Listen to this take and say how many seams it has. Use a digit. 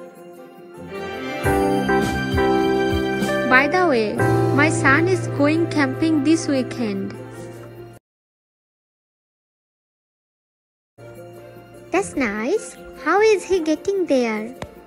0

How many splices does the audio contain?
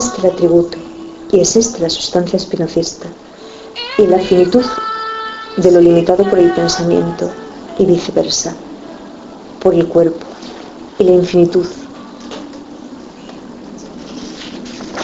1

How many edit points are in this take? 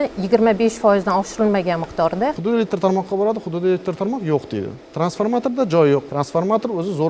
3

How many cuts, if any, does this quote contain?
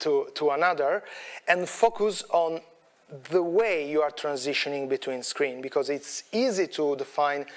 0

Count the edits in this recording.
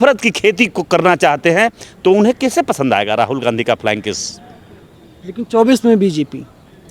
0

